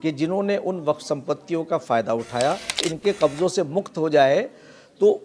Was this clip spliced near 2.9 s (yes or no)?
yes